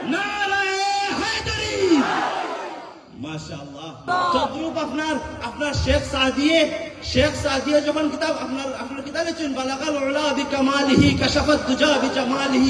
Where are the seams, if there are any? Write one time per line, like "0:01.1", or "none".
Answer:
0:04.0